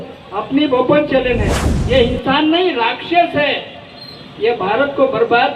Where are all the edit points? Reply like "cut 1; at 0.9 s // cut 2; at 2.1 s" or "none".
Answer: cut 1; at 1.6 s